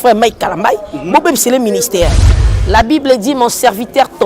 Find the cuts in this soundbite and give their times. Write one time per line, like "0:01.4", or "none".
0:02.2